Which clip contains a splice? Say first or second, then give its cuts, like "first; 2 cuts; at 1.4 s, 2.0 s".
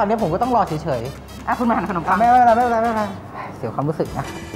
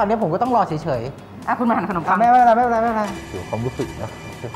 second; 1 cut; at 3.2 s